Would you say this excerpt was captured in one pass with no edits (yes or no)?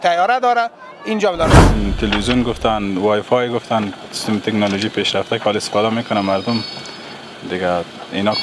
no